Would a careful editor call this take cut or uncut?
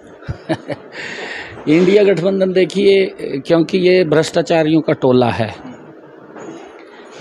uncut